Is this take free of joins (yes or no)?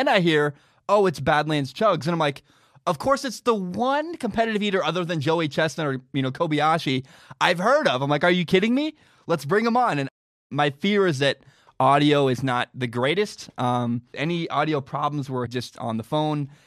no